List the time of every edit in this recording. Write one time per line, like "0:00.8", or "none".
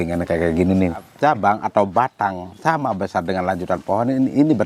0:01.1